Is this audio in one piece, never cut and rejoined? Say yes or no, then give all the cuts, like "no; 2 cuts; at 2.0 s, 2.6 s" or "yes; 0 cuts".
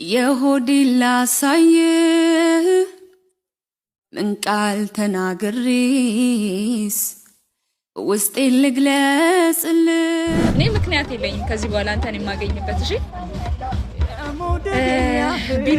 no; 1 cut; at 10.5 s